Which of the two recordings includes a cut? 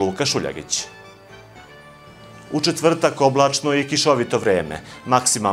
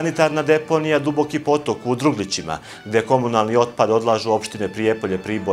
first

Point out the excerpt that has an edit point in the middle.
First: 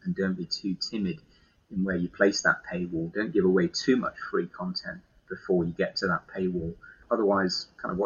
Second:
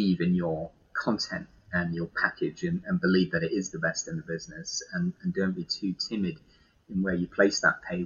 first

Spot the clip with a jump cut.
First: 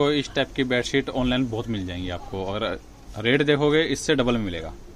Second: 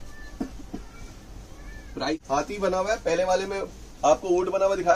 second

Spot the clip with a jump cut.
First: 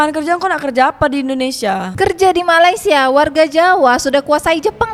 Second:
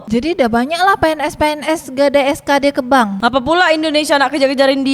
second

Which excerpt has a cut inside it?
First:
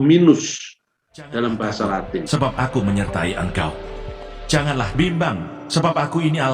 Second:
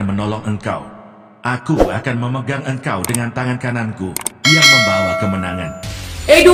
first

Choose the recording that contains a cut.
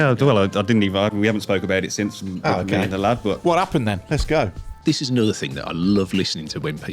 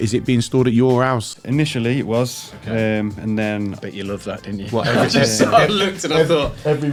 first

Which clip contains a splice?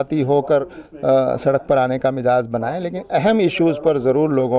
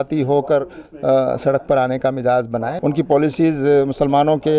second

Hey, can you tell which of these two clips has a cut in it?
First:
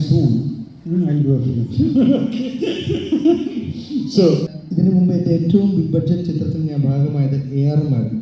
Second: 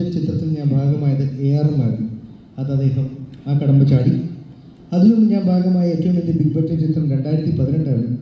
first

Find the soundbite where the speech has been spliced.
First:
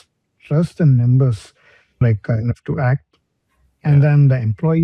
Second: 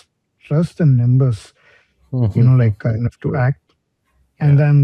first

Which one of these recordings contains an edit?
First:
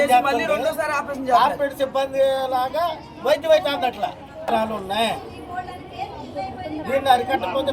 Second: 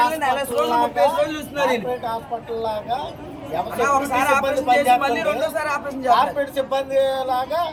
first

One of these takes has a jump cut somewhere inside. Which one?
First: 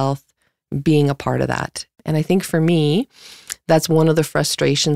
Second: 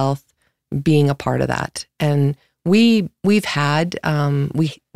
first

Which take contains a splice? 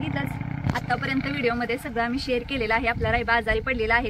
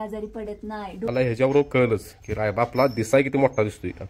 second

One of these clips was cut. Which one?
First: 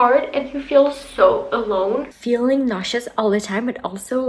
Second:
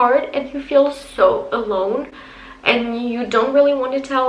first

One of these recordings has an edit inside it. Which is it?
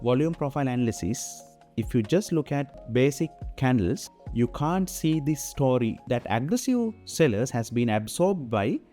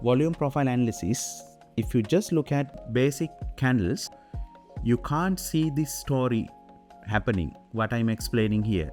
first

